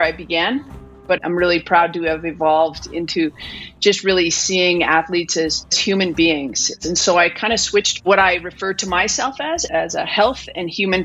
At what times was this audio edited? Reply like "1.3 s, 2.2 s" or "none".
1.1 s, 5.8 s, 6.7 s, 8.1 s, 9.6 s